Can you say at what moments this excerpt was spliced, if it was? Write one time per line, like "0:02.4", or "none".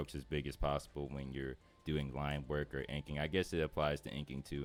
none

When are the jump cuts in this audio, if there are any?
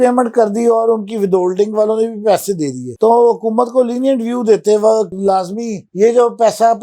0:05.1

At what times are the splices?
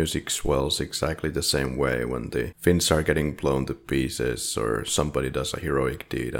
0:02.5

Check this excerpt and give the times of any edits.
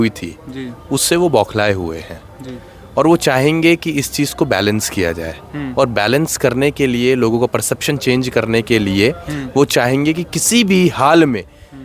none

